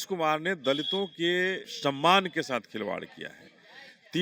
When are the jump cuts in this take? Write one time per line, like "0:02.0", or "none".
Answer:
0:01.7